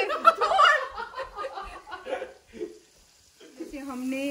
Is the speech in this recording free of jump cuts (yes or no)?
yes